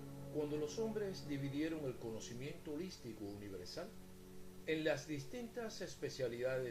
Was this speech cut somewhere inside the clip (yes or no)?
yes